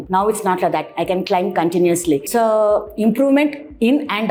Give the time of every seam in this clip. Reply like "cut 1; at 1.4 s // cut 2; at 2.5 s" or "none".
none